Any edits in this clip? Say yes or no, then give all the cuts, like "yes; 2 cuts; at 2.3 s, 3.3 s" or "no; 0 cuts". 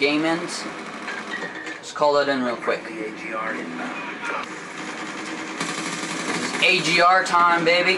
yes; 1 cut; at 4.5 s